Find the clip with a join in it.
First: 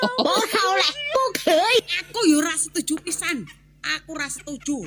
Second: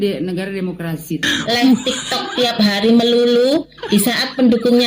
second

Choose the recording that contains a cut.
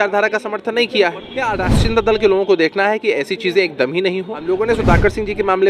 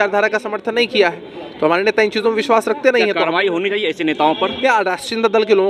first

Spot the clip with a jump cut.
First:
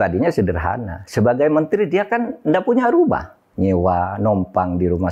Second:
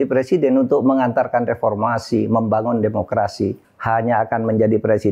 second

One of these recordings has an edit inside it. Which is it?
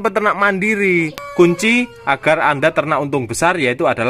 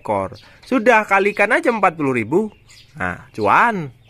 first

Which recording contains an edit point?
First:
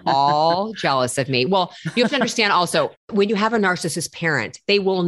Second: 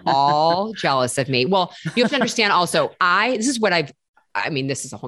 first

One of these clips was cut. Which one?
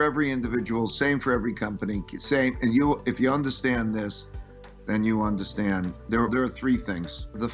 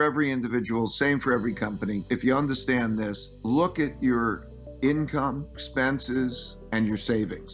second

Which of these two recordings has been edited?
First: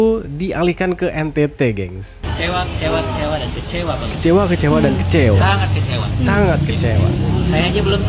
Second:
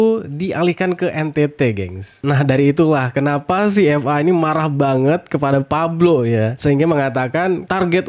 first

